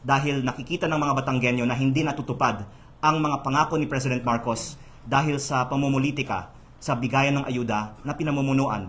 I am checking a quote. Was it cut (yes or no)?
no